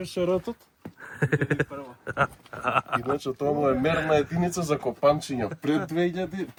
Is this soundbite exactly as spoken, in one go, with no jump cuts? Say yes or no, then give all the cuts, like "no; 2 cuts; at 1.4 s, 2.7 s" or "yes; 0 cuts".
yes; 0 cuts